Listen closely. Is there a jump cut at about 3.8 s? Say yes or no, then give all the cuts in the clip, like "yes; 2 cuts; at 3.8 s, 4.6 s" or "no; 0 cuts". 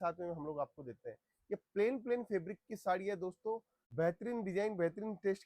yes; 1 cut; at 3.8 s